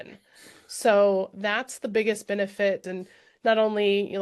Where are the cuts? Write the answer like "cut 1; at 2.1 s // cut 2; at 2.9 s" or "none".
cut 1; at 3.0 s